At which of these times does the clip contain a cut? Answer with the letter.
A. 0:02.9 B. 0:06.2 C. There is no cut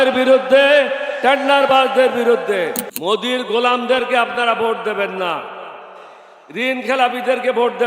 A